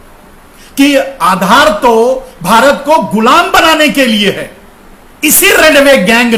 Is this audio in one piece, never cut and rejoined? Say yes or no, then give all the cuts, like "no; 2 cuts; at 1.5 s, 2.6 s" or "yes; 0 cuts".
yes; 0 cuts